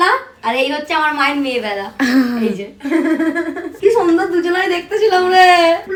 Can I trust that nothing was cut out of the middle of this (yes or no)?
yes